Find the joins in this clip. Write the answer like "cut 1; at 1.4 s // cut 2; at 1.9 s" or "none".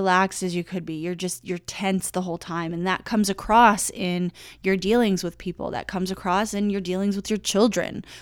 none